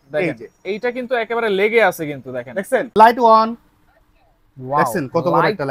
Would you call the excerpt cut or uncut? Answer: cut